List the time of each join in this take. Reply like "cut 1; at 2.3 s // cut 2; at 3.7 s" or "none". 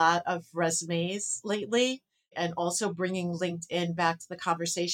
none